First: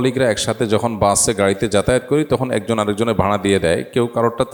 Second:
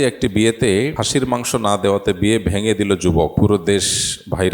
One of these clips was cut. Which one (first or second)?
second